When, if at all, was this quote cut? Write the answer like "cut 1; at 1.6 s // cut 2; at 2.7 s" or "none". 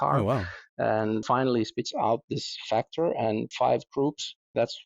cut 1; at 1.2 s // cut 2; at 3.5 s